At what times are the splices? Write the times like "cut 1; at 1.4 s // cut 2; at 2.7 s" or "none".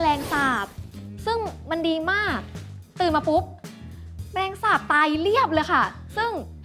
cut 1; at 2.6 s